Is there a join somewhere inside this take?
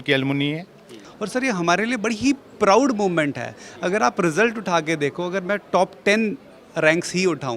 yes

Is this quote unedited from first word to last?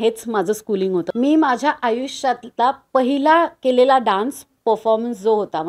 no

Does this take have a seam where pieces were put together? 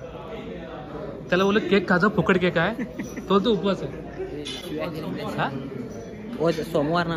yes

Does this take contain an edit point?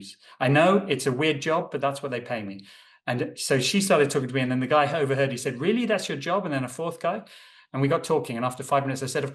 no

